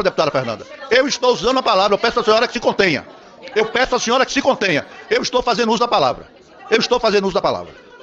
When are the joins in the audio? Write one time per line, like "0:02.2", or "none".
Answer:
none